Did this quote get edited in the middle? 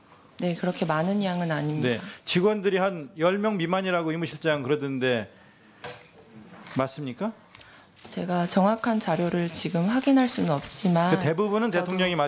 yes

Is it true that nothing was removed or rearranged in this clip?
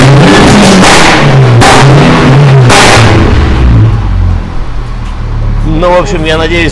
yes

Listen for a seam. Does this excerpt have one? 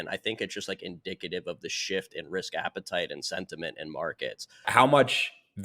yes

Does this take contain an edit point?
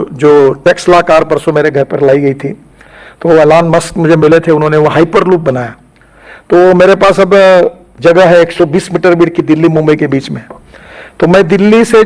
no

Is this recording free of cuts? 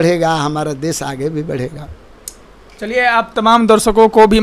yes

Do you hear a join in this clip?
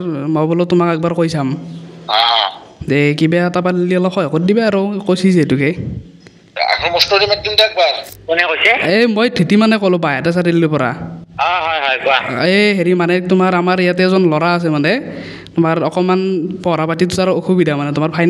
yes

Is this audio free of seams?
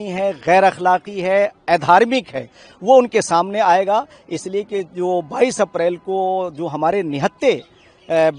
yes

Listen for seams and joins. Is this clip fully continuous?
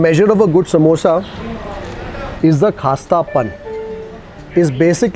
yes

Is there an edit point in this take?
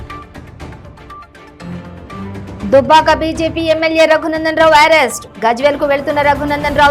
no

